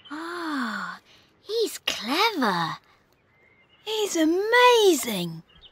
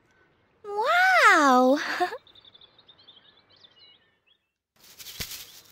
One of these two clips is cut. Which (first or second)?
second